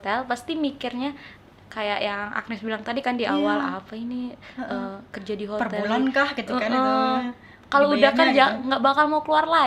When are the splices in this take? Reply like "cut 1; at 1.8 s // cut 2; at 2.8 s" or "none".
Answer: none